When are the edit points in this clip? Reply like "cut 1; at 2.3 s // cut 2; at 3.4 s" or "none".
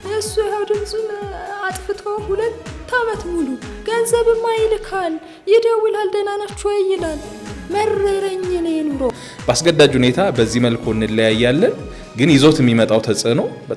cut 1; at 9.1 s